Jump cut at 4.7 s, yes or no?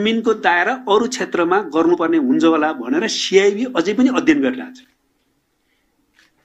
no